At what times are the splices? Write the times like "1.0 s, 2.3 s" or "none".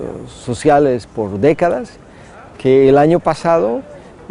1.2 s